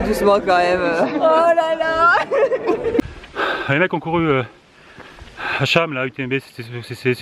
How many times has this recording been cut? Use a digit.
1